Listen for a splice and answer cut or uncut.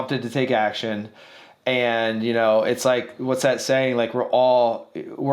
uncut